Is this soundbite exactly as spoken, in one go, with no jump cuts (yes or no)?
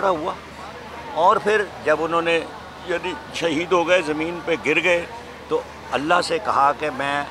yes